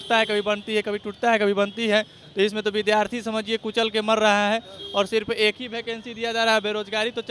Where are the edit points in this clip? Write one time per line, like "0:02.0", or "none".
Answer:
none

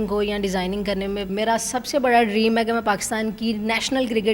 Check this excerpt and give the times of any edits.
0:01.3

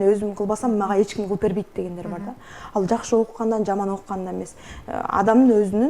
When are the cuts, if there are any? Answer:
none

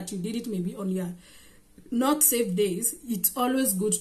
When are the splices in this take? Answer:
none

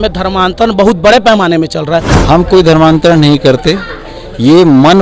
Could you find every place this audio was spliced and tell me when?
0:02.1

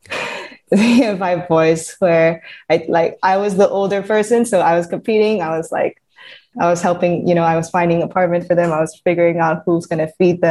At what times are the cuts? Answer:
0:06.5

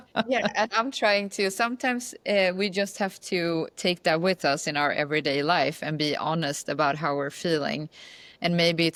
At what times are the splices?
none

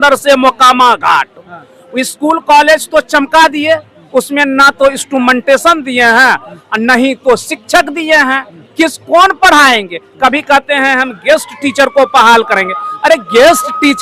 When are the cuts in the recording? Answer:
none

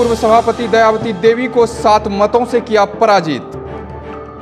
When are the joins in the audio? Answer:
none

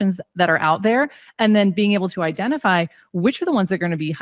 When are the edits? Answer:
none

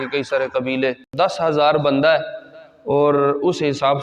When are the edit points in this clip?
0:01.1

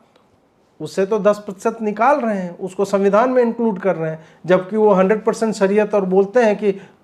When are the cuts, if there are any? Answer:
none

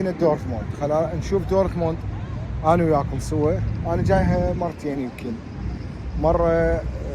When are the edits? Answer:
none

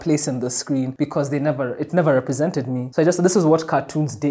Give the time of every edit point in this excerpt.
0:00.9
0:02.8

